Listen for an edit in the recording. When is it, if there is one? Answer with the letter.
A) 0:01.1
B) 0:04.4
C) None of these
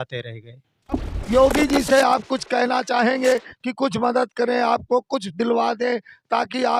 A